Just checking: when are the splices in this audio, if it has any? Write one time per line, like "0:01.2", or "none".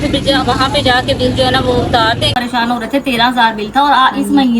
0:02.3

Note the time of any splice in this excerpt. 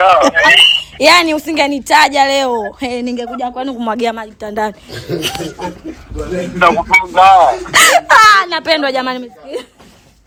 none

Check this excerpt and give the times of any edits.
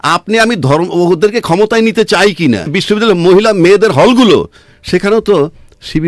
0:02.8

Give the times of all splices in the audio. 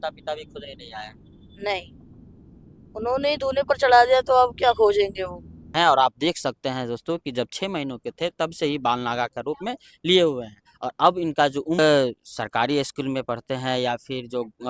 0:05.7
0:11.8

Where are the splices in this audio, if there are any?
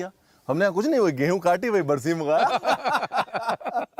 none

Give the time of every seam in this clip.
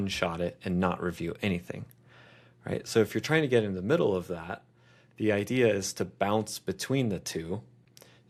none

